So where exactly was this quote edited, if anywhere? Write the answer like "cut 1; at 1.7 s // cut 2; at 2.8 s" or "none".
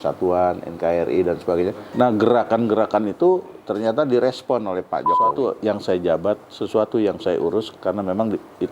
cut 1; at 1.8 s // cut 2; at 5.3 s